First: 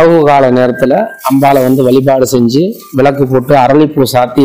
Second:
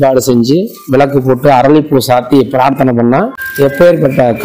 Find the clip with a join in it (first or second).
second